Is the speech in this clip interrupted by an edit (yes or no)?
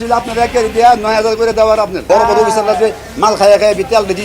yes